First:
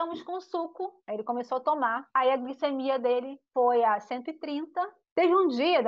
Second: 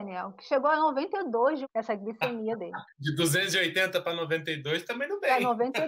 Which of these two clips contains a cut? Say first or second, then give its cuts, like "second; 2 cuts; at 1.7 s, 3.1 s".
first; 2 cuts; at 1.0 s, 5.0 s